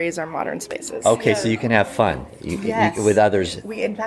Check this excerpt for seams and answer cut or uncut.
uncut